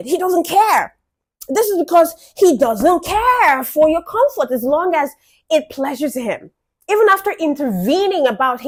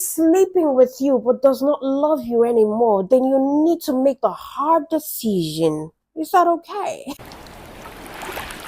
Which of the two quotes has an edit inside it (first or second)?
second